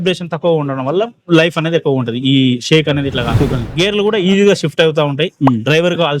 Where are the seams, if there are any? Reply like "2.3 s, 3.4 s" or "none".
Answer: 3.7 s